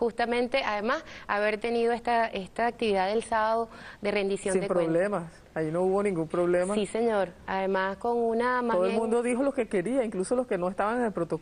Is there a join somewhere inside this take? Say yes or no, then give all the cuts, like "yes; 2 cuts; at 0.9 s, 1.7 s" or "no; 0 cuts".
no; 0 cuts